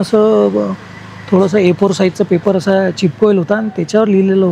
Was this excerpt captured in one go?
yes; 0 cuts

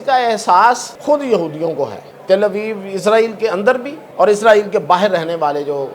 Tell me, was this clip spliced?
yes; 3 cuts; at 0.9 s, 2.1 s, 4.0 s

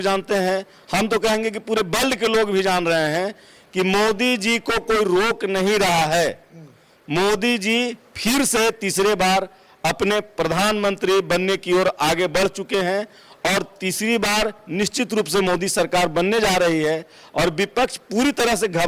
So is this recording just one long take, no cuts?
yes; 0 cuts

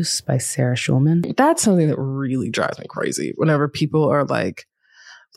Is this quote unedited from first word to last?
no; 1 cut; at 1.3 s

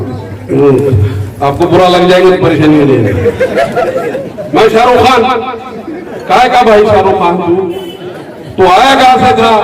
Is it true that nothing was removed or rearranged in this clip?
no; 1 cut; at 4.3 s

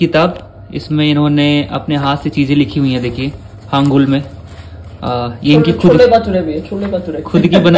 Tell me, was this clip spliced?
no; 0 cuts

